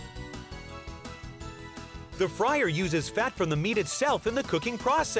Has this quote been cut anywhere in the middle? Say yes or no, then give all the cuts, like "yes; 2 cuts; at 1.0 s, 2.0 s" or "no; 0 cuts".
yes; 1 cut; at 2.2 s